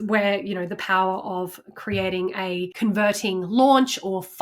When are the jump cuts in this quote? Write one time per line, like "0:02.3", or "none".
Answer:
0:02.7